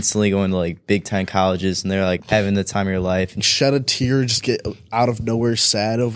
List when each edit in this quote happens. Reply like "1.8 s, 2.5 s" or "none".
3.3 s